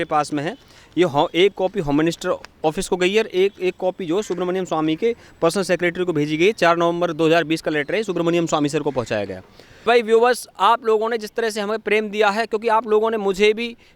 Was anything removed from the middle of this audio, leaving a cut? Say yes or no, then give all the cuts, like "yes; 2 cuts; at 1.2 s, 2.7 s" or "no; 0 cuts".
yes; 1 cut; at 9.9 s